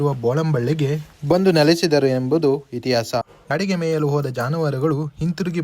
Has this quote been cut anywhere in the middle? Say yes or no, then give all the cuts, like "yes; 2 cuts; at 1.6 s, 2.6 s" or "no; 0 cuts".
yes; 1 cut; at 3.4 s